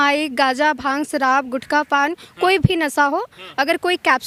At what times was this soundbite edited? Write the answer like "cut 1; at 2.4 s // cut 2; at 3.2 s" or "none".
none